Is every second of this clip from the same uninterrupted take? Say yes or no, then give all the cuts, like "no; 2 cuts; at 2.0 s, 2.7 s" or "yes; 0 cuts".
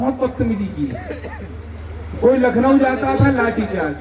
yes; 0 cuts